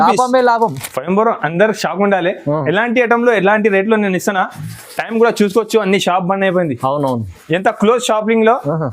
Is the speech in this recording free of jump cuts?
no; 1 cut; at 0.9 s

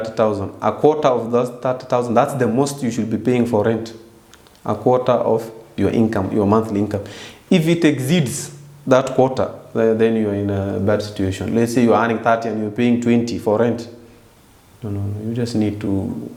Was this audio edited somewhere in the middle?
no; 0 cuts

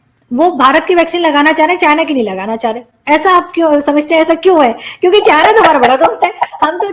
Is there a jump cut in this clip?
no; 0 cuts

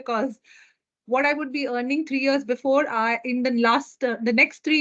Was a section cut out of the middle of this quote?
no; 0 cuts

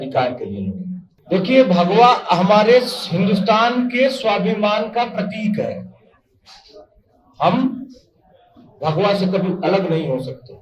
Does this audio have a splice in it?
yes; 1 cut; at 1.1 s

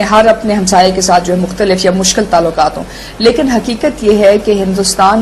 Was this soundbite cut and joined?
yes; 1 cut; at 1.5 s

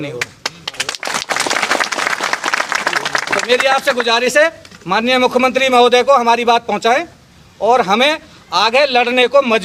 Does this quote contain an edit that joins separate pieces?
no; 0 cuts

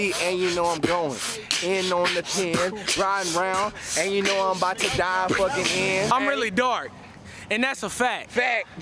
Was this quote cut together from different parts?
yes; 1 cut; at 6.1 s

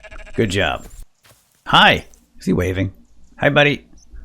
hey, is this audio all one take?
no; 1 cut; at 1.0 s

